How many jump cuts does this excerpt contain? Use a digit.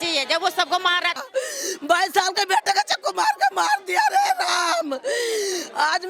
1